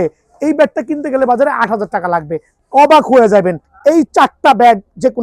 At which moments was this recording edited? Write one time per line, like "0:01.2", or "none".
0:02.5
0:03.7